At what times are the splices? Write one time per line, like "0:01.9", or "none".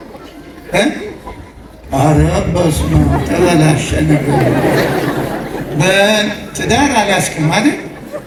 none